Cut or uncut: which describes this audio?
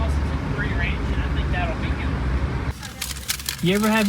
cut